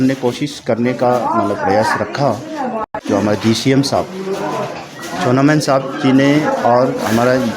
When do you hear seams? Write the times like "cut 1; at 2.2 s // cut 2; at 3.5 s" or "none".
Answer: cut 1; at 2.9 s